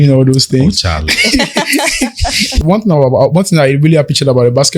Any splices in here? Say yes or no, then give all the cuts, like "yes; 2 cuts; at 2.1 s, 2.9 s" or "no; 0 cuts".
yes; 1 cut; at 2.6 s